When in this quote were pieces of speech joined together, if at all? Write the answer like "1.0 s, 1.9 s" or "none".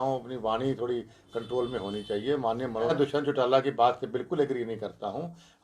2.9 s

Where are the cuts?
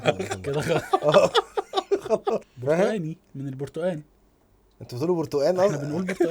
2.5 s

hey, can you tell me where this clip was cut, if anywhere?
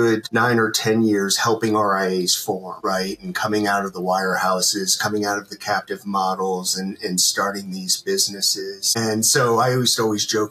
none

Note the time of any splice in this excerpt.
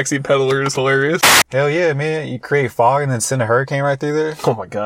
1.4 s

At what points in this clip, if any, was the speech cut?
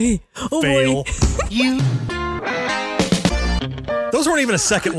4.1 s

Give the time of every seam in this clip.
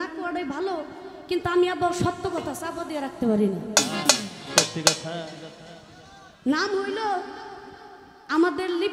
none

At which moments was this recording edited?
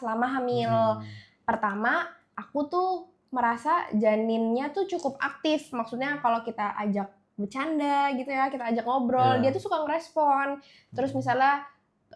none

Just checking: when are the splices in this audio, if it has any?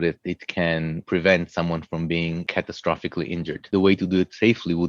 1.0 s, 2.5 s, 3.6 s

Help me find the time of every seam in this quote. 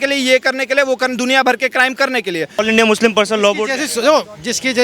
2.6 s

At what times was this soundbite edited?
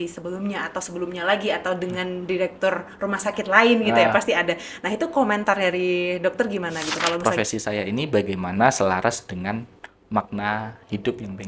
7.2 s

